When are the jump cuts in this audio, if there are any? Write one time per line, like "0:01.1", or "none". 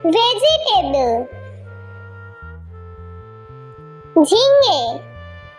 none